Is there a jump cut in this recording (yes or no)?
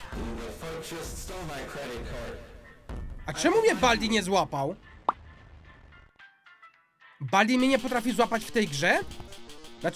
no